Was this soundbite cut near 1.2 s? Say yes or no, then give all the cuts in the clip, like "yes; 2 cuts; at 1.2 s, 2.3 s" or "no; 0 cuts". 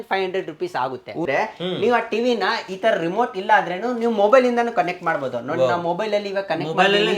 yes; 1 cut; at 1.2 s